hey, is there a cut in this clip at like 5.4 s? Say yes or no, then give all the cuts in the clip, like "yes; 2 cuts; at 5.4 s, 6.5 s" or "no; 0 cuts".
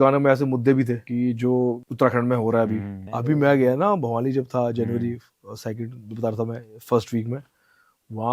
no; 3 cuts; at 1.0 s, 1.8 s, 3.1 s